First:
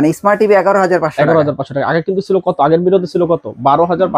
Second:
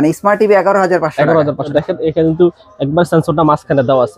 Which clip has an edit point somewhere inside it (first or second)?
second